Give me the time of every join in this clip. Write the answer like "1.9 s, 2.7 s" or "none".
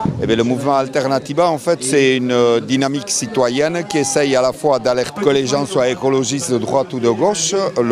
none